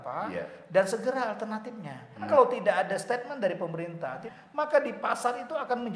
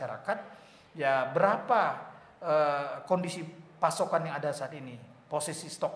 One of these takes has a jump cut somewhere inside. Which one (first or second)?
first